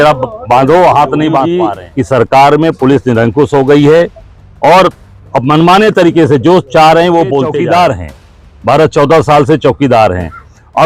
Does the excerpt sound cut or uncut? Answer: cut